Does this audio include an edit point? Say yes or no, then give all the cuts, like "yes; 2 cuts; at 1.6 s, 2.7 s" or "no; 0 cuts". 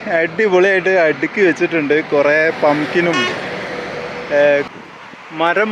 yes; 1 cut; at 4.7 s